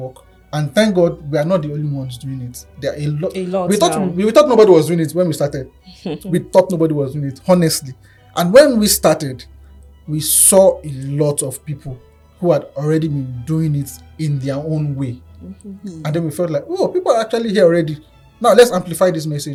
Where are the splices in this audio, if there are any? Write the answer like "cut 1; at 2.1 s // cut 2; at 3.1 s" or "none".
none